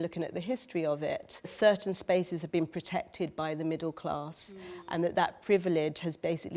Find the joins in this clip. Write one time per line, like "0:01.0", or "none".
0:01.5

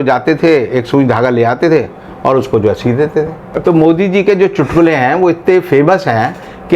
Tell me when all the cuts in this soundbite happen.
0:03.5

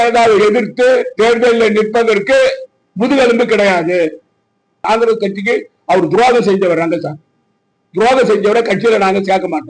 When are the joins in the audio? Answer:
0:04.8

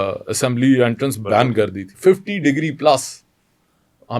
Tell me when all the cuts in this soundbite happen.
0:01.8

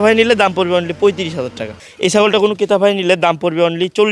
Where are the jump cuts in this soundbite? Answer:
0:01.8

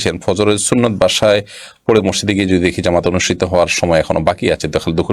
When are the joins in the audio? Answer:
none

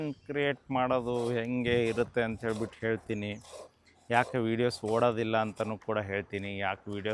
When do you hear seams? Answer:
none

